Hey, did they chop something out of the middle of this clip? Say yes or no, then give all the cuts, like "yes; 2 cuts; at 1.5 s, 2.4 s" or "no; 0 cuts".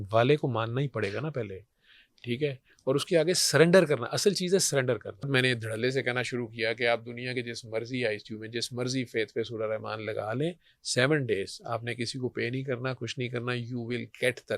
yes; 1 cut; at 5.3 s